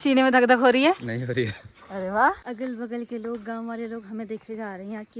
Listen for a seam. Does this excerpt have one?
yes; 1 cut; at 2.4 s

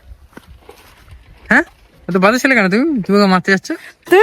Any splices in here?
no; 0 cuts

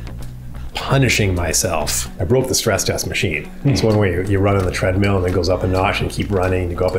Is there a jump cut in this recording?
yes; 1 cut; at 2.1 s

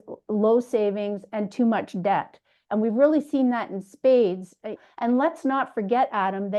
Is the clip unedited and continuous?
no; 1 cut; at 4.7 s

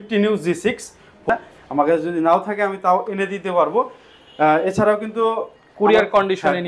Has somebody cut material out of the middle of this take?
yes; 1 cut; at 1.2 s

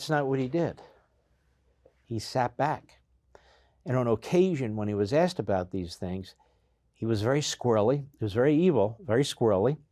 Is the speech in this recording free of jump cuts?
yes; 0 cuts

